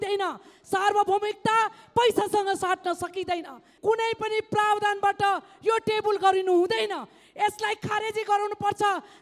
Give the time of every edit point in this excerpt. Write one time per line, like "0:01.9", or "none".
0:03.6